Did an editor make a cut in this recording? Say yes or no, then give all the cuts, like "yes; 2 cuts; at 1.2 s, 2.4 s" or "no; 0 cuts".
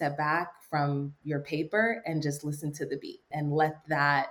yes; 1 cut; at 3.3 s